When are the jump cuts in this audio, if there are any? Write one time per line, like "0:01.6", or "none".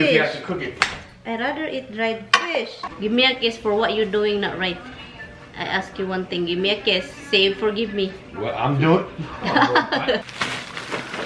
0:02.8
0:10.2

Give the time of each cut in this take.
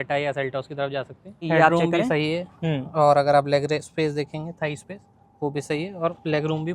0:01.4

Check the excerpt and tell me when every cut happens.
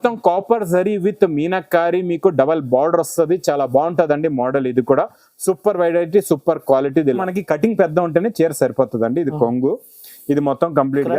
0:07.2

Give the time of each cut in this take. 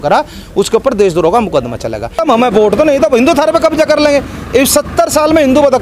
0:02.2

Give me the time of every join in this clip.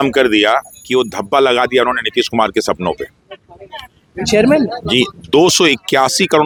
none

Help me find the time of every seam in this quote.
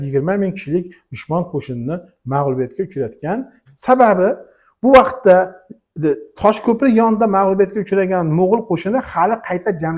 0:03.6

